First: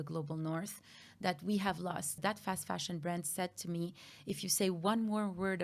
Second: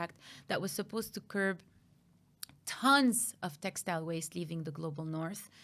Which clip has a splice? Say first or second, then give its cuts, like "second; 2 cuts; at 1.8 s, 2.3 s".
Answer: first; 1 cut; at 2.2 s